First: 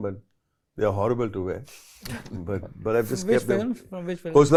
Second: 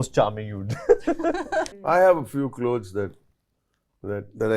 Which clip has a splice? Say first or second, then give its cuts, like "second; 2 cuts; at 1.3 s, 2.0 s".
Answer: second; 1 cut; at 1.7 s